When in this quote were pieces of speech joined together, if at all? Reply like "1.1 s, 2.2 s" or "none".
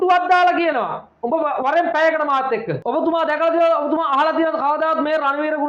2.7 s